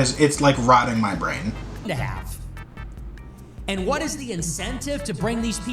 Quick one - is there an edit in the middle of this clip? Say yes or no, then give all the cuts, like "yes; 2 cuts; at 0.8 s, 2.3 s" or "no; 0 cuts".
no; 0 cuts